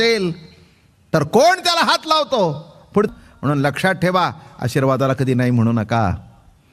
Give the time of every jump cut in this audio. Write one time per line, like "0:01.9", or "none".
0:03.1